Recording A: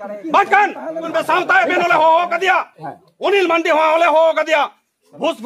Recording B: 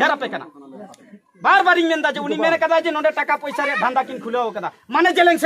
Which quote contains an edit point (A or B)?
A